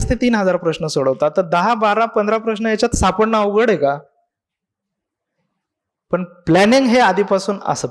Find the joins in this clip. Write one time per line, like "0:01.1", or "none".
none